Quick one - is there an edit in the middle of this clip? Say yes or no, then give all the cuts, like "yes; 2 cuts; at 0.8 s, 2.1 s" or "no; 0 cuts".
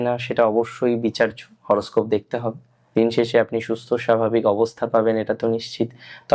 yes; 1 cut; at 2.7 s